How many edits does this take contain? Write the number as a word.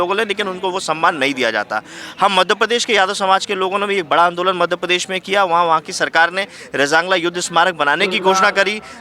zero